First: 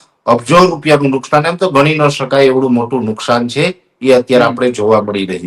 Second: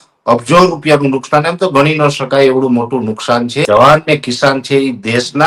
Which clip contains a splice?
second; 1 cut; at 3.7 s

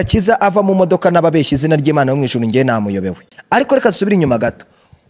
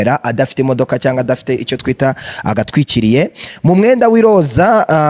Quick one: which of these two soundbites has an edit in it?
first; 1 cut; at 3.3 s

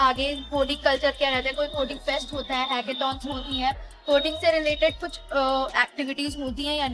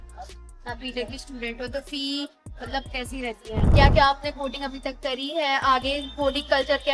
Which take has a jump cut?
second; 1 cut; at 3.6 s

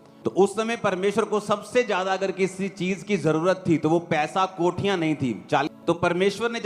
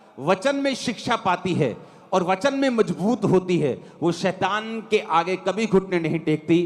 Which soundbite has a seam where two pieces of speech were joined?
first; 1 cut; at 5.6 s

